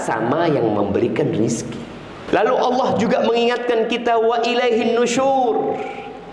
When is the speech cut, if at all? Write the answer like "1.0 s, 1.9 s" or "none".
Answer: 2.1 s